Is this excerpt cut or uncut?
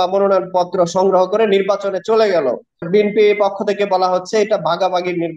cut